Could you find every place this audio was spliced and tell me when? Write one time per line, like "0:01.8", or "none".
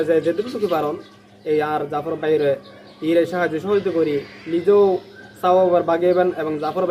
none